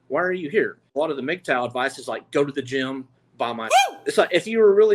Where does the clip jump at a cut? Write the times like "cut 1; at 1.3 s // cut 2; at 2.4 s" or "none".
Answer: cut 1; at 0.9 s // cut 2; at 3.8 s